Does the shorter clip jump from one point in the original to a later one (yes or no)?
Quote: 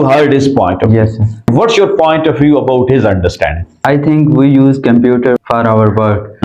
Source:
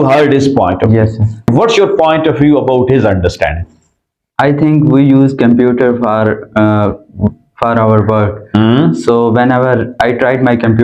yes